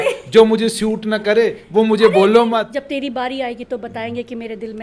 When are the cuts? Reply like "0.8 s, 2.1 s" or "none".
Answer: 2.7 s